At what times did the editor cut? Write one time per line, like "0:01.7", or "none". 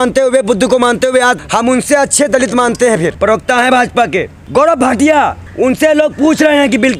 0:01.4
0:03.1
0:04.4
0:05.4